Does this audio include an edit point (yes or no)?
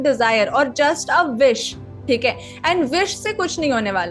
no